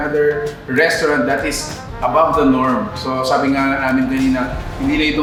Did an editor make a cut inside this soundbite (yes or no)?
no